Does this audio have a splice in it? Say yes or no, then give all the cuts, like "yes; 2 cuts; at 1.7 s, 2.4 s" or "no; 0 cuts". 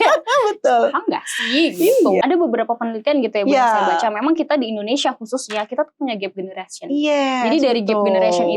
yes; 1 cut; at 2.2 s